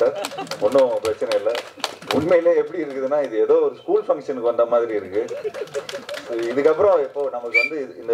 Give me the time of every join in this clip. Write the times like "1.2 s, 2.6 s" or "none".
none

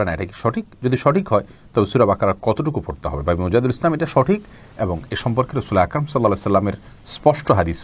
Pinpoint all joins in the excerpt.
none

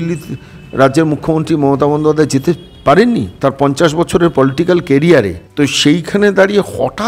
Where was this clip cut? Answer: 3.3 s, 5.4 s

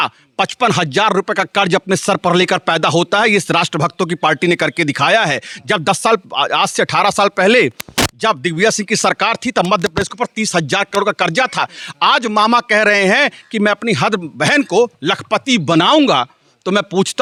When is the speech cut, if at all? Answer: none

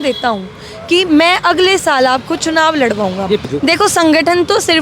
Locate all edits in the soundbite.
3.5 s

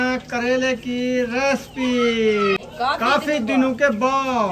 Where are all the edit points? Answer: 2.6 s

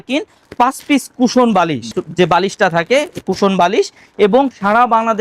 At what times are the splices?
none

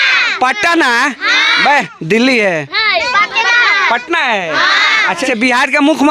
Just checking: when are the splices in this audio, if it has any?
none

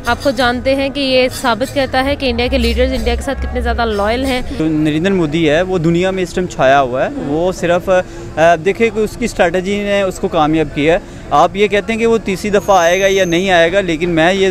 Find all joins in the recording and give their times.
4.5 s

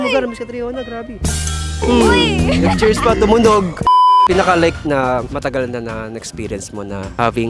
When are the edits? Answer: 4.1 s

